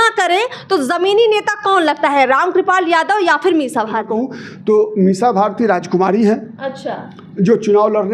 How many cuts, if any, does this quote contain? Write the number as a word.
one